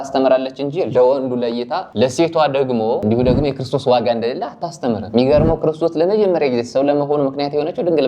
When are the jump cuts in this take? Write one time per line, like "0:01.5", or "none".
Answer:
0:01.8
0:05.0